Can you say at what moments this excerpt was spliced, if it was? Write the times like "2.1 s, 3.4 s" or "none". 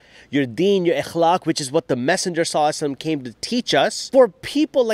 4.0 s

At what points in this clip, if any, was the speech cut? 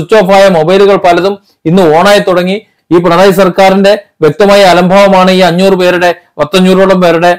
2.7 s

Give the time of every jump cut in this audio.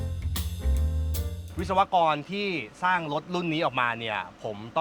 1.5 s

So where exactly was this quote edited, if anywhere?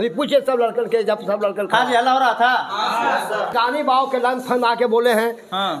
3.5 s

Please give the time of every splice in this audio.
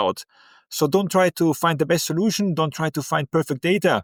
none

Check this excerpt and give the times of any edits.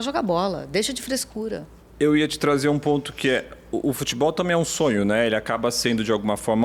none

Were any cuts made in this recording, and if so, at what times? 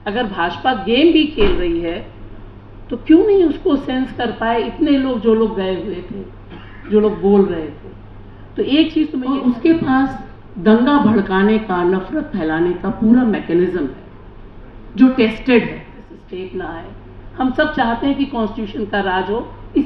9.2 s, 16.2 s

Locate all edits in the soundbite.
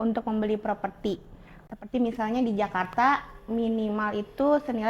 1.6 s

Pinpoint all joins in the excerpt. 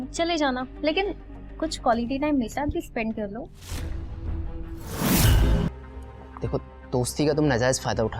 5.7 s

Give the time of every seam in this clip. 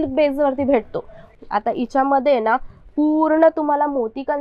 1.2 s

